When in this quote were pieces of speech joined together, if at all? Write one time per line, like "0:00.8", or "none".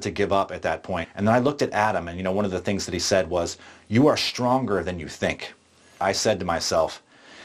0:01.1
0:06.0